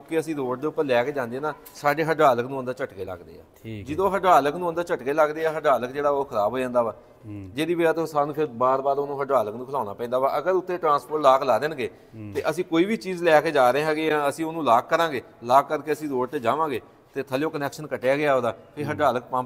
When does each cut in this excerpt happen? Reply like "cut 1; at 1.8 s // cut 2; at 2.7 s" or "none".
none